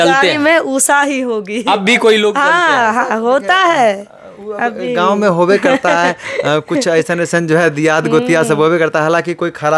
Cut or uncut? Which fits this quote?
uncut